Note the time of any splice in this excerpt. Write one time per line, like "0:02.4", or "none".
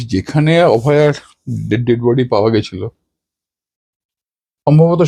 none